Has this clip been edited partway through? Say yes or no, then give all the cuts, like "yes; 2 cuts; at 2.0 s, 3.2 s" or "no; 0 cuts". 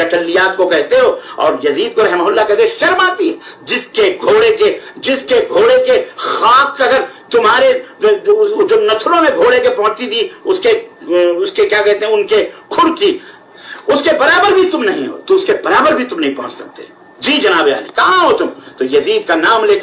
no; 0 cuts